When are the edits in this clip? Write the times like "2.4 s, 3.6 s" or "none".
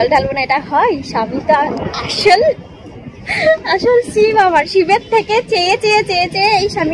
none